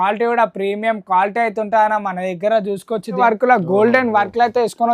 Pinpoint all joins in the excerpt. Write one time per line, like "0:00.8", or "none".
0:03.2